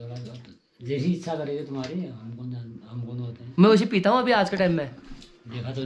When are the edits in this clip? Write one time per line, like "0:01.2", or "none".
none